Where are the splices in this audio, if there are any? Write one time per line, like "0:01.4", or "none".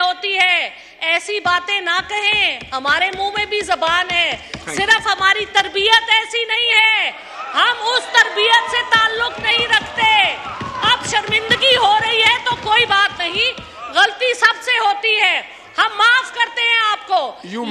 none